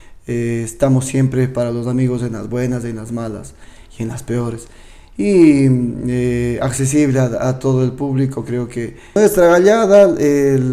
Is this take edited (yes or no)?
yes